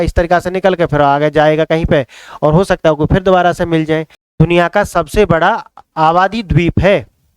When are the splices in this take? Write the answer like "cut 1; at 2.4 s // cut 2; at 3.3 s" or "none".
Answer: cut 1; at 4.2 s